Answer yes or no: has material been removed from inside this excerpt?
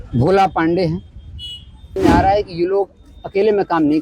yes